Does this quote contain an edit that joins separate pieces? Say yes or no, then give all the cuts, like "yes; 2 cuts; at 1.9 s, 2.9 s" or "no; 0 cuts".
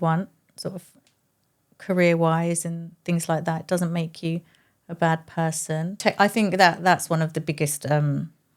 yes; 1 cut; at 6.0 s